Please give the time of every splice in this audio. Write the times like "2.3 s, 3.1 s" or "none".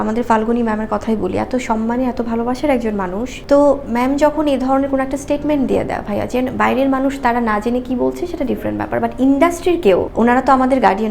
3.3 s, 10.1 s